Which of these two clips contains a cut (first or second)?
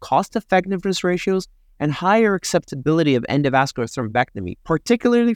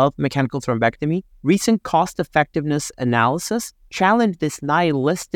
second